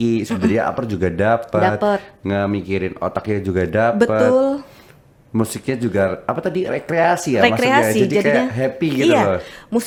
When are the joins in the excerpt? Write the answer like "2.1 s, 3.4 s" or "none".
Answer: none

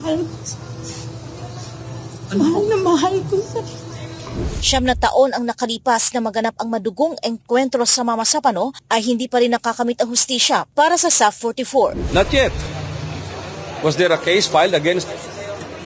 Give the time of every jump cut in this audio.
12.0 s

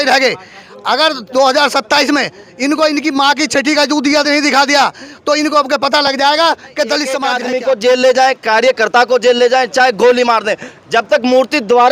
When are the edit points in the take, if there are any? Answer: 7.3 s

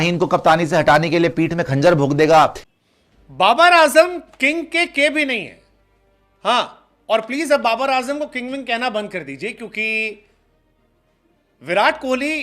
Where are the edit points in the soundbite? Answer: 2.6 s

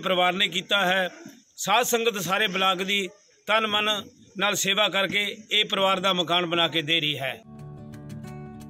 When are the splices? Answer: 7.5 s

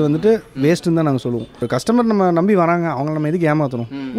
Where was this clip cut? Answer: 1.6 s

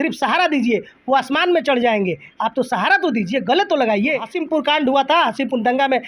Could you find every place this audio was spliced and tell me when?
4.3 s

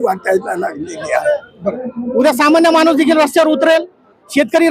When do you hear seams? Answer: 1.6 s

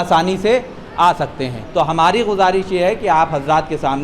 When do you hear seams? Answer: 1.5 s

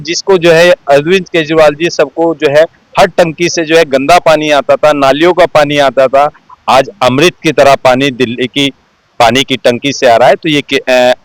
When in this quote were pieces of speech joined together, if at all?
none

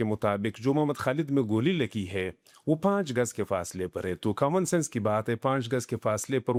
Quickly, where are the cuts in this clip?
none

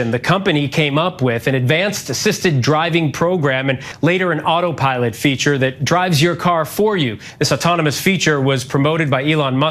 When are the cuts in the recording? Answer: none

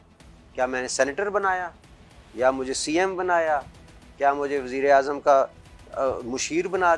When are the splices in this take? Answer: none

